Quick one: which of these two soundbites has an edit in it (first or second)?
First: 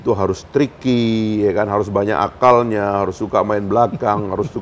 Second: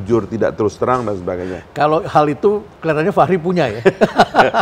second